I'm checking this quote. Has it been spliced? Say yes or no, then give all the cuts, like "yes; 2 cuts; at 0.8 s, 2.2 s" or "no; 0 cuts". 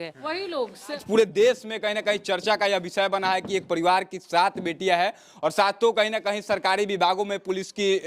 yes; 1 cut; at 1.0 s